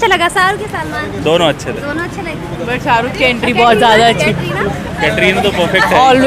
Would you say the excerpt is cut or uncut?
uncut